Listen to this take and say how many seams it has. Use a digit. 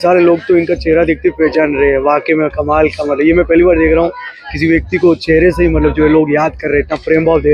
0